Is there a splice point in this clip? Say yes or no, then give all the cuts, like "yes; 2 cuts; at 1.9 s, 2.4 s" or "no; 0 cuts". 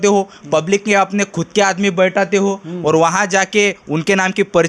no; 0 cuts